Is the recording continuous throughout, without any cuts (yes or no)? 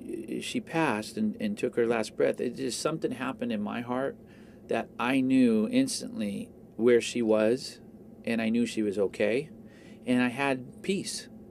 yes